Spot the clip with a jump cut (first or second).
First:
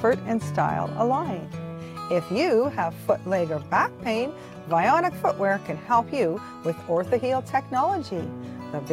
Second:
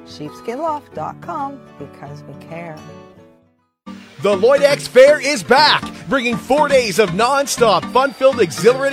second